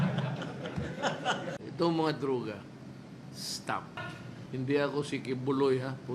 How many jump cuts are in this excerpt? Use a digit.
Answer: 2